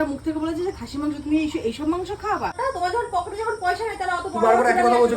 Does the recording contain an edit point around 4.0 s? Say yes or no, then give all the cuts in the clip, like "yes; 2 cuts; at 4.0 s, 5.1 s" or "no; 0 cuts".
no; 1 cut; at 2.6 s